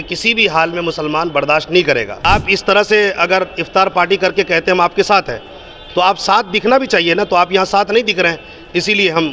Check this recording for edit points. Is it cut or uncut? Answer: cut